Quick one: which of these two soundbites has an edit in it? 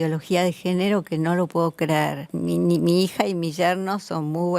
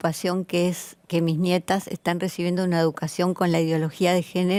first; 1 cut; at 2.3 s

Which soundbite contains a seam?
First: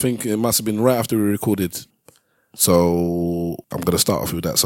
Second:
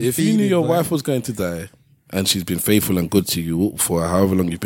first; 2 cuts; at 1.8 s, 3.7 s

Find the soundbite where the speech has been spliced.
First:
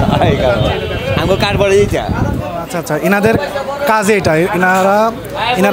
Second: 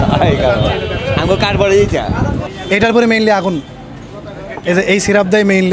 second; 1 cut; at 2.5 s

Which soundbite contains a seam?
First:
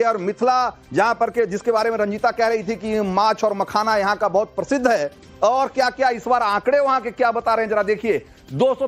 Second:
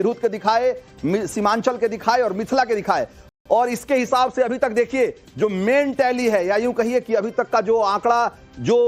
first; 1 cut; at 3.3 s

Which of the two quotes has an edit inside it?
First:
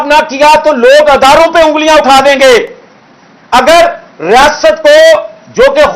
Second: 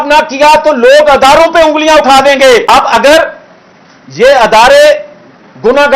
second; 1 cut; at 2.6 s

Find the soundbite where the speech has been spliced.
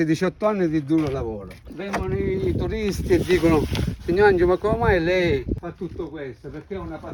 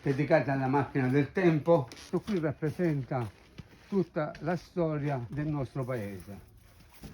second; 2 cuts; at 2.0 s, 5.3 s

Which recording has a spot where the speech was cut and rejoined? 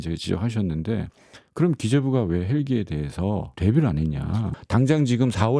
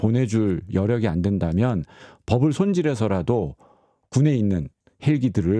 first; 2 cuts; at 3.5 s, 4.5 s

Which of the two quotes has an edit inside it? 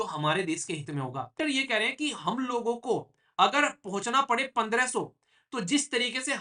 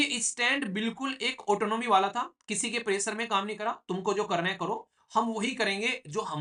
first; 1 cut; at 1.3 s

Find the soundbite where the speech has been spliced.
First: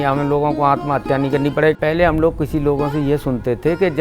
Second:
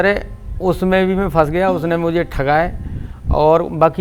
first; 1 cut; at 1.7 s

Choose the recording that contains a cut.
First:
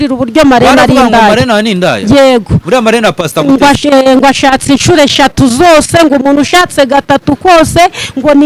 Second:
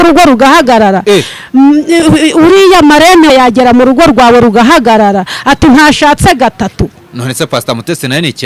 second; 1 cut; at 3.3 s

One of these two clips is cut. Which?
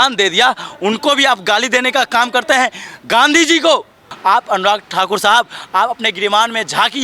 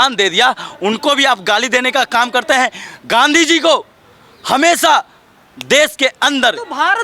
first; 1 cut; at 4.0 s

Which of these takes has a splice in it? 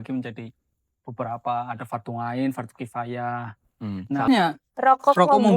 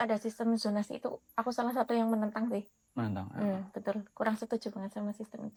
first; 1 cut; at 4.3 s

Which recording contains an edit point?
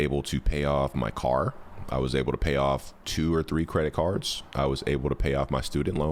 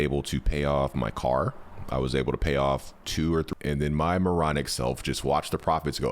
second; 1 cut; at 3.5 s

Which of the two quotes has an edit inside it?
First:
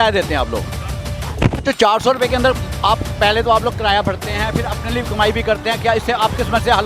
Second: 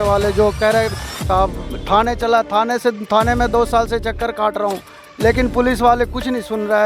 second; 1 cut; at 1.2 s

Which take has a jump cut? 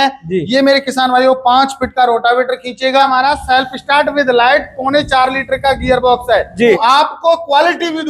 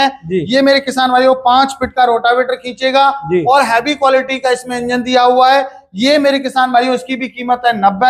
first; 2 cuts; at 3.1 s, 6.8 s

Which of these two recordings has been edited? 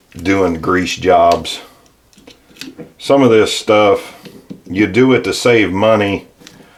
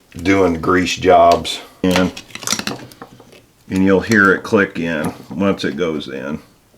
second; 1 cut; at 1.8 s

